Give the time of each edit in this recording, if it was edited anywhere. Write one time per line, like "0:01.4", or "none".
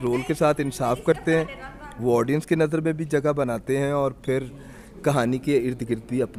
none